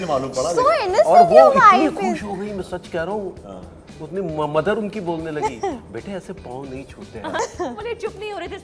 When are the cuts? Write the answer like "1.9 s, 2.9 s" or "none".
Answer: 7.4 s